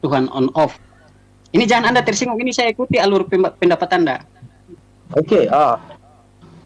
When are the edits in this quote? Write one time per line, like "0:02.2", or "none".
none